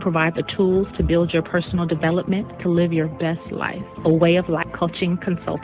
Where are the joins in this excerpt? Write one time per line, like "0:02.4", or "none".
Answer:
0:04.7